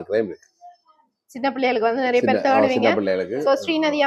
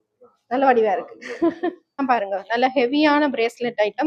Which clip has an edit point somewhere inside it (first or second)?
second